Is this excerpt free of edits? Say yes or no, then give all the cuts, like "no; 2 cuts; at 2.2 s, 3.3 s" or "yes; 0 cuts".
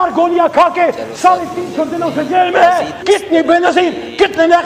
no; 1 cut; at 2.9 s